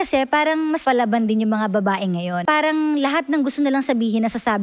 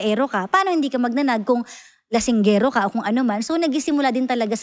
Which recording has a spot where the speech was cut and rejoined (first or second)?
first